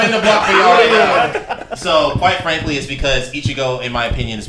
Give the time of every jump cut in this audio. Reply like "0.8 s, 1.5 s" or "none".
1.3 s